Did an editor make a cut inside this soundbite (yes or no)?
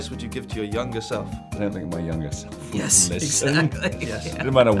yes